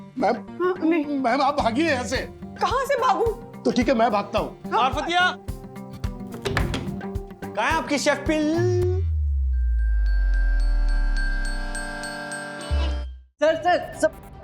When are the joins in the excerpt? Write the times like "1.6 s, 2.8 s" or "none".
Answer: 13.2 s